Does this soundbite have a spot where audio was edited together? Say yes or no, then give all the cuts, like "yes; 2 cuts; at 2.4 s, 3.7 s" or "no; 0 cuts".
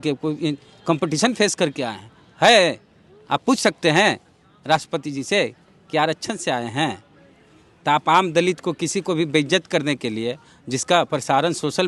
no; 0 cuts